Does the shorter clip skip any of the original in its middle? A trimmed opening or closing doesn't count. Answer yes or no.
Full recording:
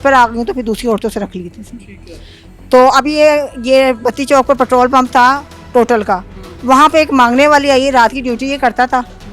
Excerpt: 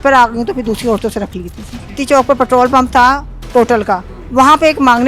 yes